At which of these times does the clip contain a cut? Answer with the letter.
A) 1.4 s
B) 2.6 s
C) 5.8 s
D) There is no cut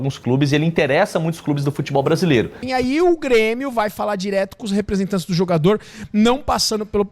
B